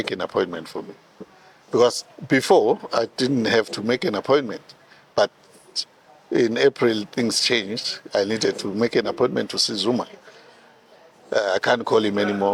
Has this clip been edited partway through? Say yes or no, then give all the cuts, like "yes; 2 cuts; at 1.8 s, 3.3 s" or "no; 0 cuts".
no; 0 cuts